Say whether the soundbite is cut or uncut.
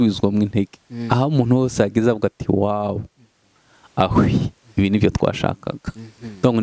uncut